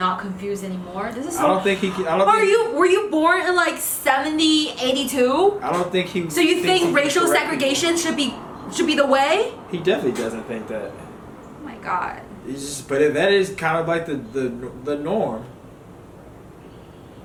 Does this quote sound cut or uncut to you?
uncut